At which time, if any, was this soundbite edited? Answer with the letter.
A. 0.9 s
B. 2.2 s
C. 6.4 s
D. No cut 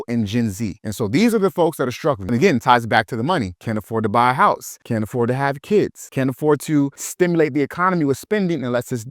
B